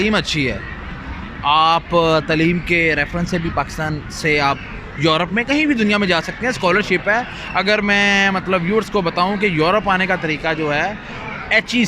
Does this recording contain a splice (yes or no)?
no